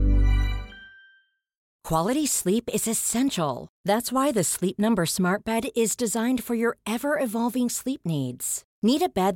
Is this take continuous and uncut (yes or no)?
yes